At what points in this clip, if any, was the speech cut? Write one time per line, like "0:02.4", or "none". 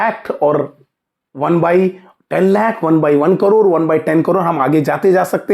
none